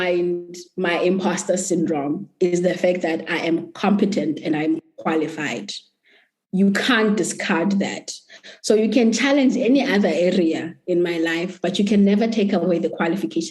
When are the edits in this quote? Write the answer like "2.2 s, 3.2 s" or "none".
4.9 s